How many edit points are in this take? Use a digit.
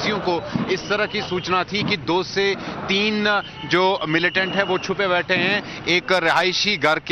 0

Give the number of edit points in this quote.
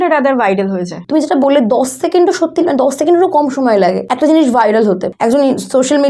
3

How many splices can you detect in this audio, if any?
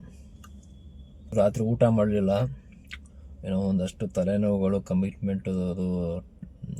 1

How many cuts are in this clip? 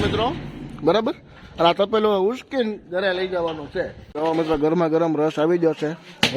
1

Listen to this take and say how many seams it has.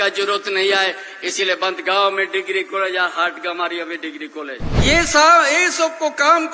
1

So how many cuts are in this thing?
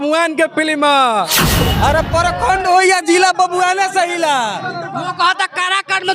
1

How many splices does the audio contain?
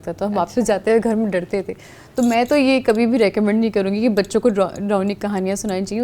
0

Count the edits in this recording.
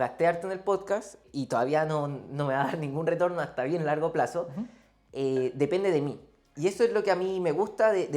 1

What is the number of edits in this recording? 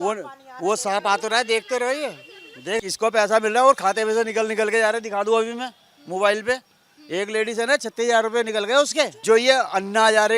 2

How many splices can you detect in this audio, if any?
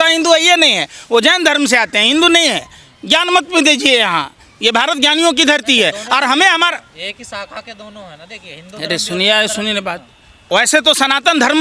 0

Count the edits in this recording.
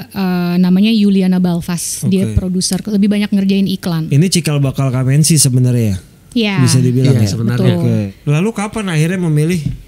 2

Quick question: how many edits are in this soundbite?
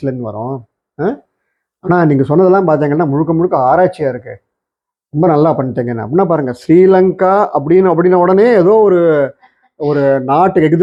0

